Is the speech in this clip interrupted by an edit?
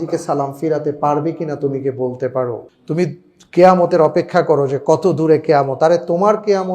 yes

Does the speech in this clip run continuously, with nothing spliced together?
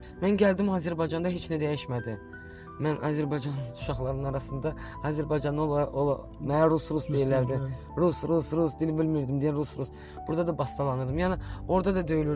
yes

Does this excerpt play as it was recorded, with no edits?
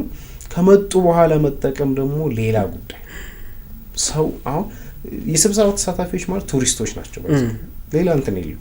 yes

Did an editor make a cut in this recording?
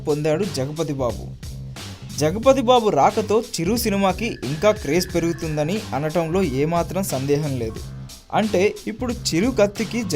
yes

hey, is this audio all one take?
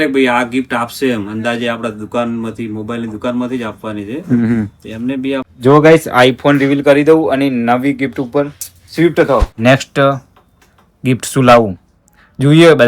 no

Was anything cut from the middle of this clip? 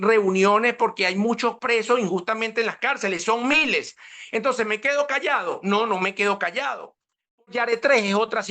yes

